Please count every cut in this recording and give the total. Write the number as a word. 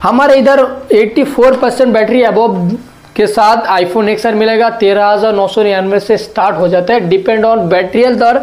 zero